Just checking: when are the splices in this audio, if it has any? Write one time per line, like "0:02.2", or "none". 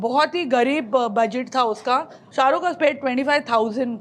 0:02.2